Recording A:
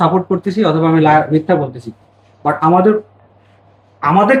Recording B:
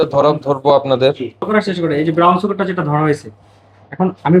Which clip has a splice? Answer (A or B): B